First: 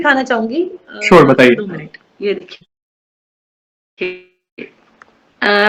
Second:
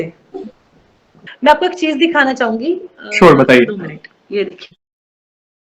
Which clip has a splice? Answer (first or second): second